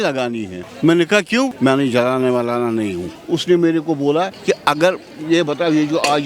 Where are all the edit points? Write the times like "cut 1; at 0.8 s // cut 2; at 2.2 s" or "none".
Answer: cut 1; at 1.5 s // cut 2; at 3.1 s // cut 3; at 4.4 s